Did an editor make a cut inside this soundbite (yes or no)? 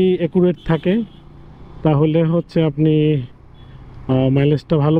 no